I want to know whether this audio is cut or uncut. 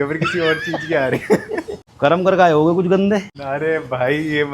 cut